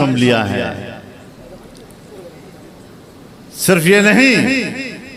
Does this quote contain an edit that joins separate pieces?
no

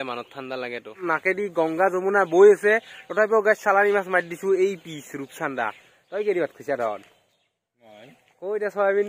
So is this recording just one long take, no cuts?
no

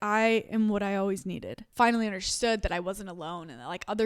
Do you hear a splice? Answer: yes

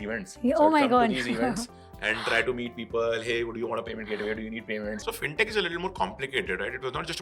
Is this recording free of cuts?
no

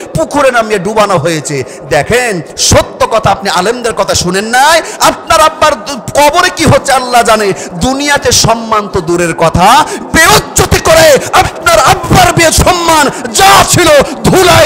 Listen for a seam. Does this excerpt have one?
no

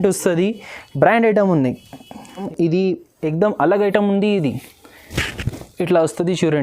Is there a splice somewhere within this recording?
yes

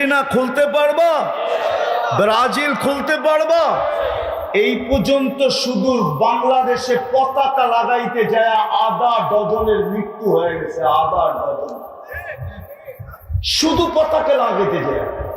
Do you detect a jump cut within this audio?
yes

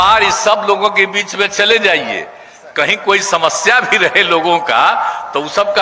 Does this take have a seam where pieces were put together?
no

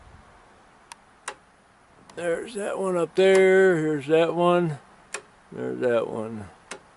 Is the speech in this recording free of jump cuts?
yes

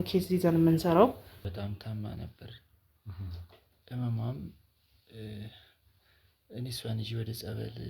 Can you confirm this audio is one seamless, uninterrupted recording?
no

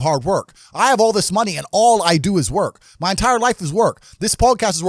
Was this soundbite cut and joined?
no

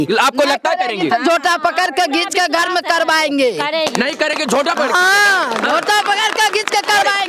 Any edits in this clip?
no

